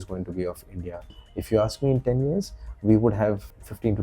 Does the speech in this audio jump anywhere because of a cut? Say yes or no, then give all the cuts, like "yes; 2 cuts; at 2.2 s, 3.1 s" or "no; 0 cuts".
yes; 1 cut; at 1.1 s